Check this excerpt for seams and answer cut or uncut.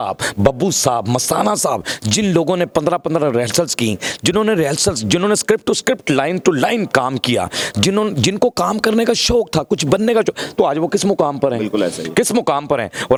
uncut